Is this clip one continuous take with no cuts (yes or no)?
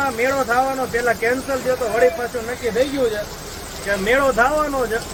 yes